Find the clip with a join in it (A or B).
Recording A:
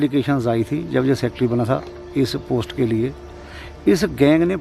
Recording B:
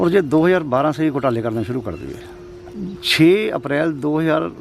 B